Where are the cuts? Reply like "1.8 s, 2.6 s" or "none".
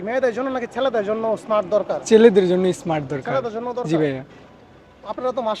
none